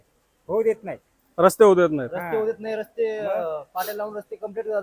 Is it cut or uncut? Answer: uncut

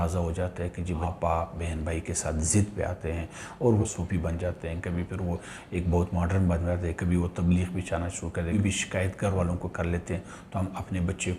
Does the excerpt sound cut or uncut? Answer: cut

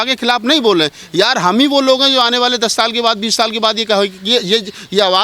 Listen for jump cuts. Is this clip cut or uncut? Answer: uncut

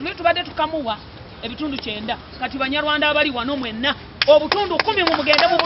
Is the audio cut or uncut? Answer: uncut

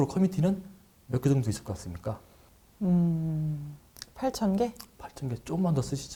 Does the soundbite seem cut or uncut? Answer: uncut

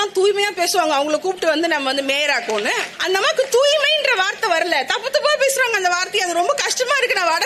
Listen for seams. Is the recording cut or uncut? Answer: cut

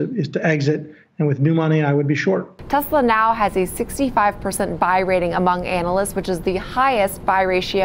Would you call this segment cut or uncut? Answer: cut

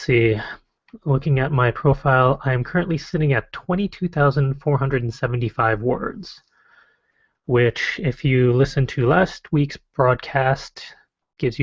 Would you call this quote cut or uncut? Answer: cut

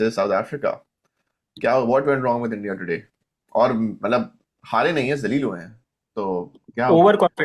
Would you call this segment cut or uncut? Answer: uncut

